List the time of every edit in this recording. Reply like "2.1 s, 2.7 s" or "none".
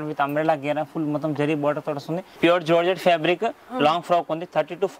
2.4 s